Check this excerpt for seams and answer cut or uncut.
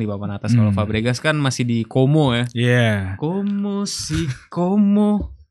uncut